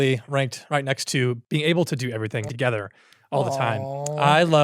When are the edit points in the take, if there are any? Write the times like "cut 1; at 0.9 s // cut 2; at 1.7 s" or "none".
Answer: cut 1; at 1.4 s // cut 2; at 2.5 s